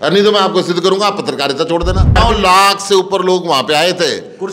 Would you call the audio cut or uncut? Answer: cut